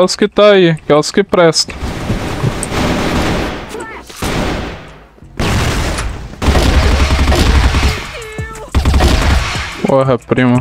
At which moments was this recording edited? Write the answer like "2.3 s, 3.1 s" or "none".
2.7 s